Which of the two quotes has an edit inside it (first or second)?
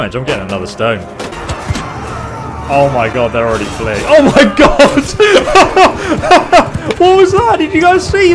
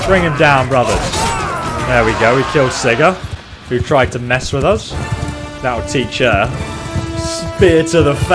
first